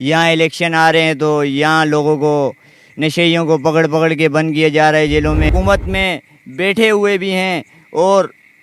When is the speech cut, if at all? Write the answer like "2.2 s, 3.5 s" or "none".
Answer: 5.5 s